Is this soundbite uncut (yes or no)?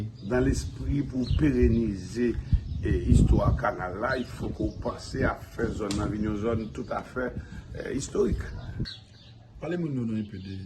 no